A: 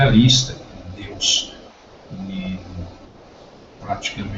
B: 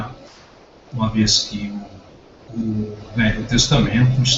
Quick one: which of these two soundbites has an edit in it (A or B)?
A